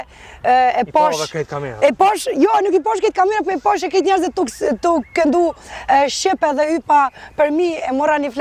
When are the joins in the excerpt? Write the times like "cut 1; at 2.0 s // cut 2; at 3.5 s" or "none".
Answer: none